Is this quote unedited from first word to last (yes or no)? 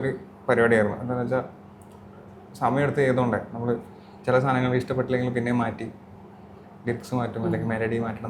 yes